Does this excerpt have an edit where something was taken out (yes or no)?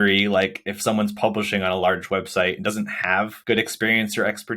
yes